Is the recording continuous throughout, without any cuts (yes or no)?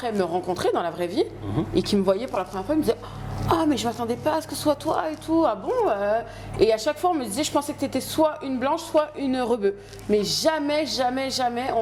yes